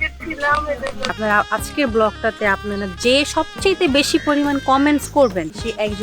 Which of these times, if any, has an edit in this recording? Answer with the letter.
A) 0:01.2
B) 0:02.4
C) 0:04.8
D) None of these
A